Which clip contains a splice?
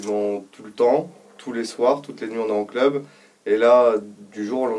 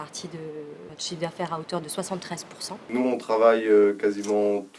second; 2 cuts; at 0.9 s, 2.9 s

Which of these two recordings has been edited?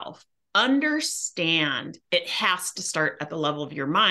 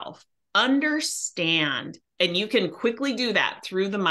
first; 1 cut; at 1.9 s

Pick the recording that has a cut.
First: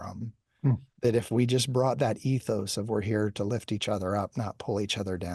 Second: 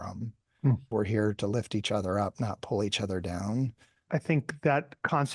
second; 2 cuts; at 0.8 s, 4.0 s

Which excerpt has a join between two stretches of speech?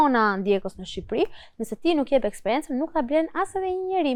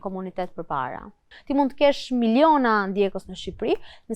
second; 1 cut; at 1.3 s

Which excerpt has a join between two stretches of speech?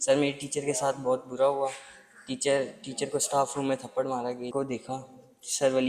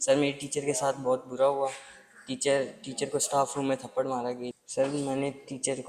first; 1 cut; at 4.5 s

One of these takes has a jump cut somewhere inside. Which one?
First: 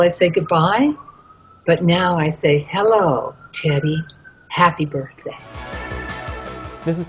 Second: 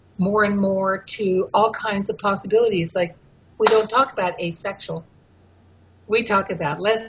first; 1 cut; at 1.4 s

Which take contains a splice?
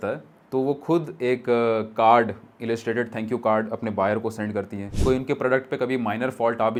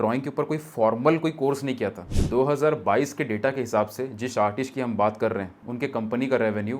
second; 2 cuts; at 2.0 s, 5.6 s

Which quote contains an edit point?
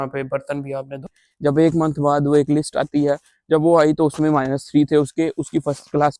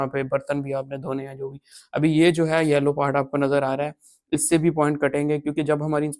first; 1 cut; at 1.2 s

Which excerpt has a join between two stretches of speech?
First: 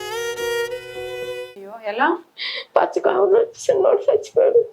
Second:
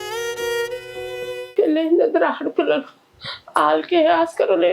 second; 1 cut; at 1.4 s

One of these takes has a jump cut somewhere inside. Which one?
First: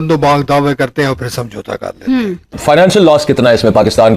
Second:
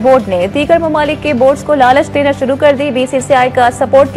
first; 1 cut; at 2.6 s

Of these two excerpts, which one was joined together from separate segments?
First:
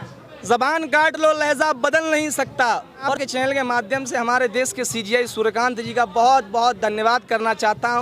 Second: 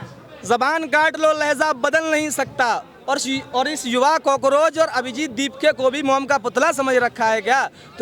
first; 1 cut; at 3.2 s

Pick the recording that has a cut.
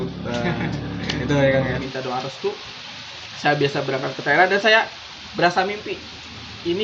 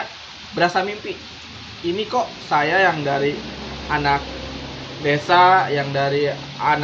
first; 1 cut; at 1.7 s

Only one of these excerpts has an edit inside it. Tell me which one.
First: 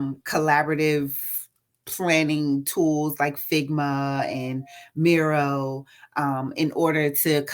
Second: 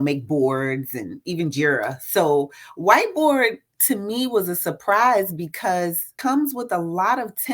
second; 1 cut; at 6.1 s

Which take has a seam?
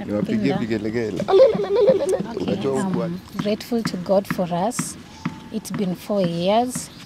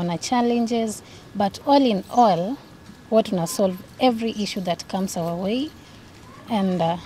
first; 1 cut; at 2.8 s

